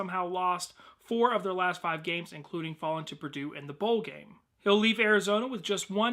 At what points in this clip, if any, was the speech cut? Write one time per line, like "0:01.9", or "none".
0:04.8